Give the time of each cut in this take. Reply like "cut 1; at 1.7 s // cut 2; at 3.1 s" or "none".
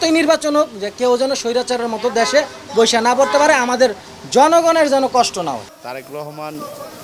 none